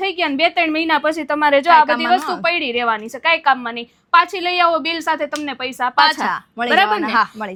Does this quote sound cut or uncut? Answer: uncut